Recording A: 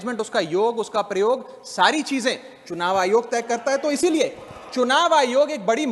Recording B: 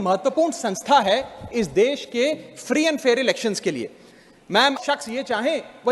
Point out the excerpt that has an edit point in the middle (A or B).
B